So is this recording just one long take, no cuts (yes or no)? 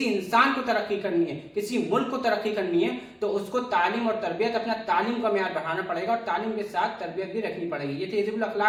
yes